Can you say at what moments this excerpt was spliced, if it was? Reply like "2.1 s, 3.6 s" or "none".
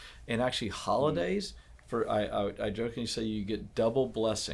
none

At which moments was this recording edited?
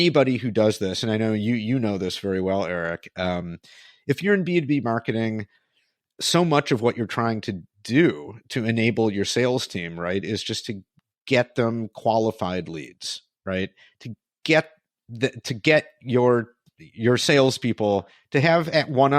none

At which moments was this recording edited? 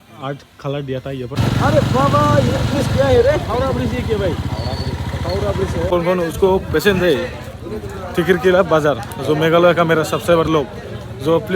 1.4 s, 5.9 s

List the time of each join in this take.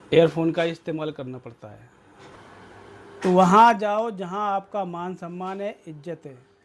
2.3 s

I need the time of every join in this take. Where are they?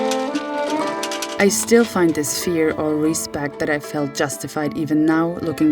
1.3 s

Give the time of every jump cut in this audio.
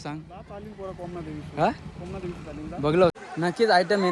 3.1 s

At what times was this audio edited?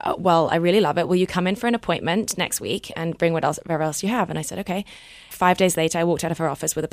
5.3 s

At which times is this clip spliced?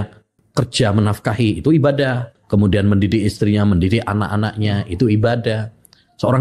2.4 s

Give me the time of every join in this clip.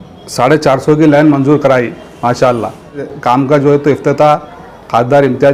3.1 s

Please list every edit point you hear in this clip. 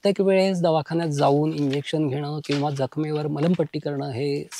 none

